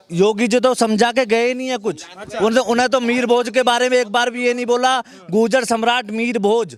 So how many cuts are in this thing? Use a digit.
0